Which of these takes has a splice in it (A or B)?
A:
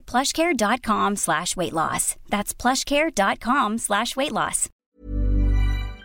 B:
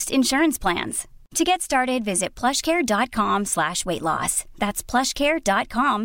A